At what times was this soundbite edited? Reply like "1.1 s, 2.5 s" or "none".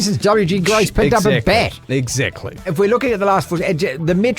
2.7 s